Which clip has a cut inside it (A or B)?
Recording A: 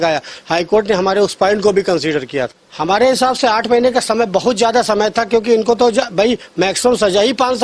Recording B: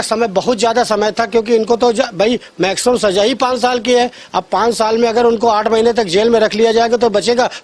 A